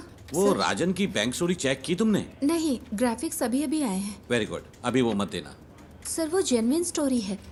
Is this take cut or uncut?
uncut